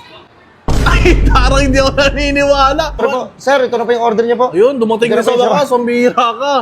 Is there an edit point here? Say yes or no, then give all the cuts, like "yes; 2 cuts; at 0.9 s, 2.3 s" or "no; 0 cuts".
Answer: yes; 1 cut; at 3.0 s